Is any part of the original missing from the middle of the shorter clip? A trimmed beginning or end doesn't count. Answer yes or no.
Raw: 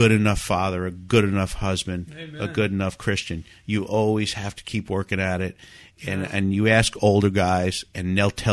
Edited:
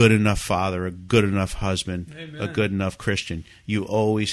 no